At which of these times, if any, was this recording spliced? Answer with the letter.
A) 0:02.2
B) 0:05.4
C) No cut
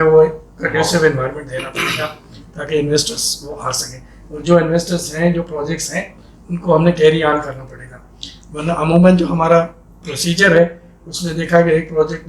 C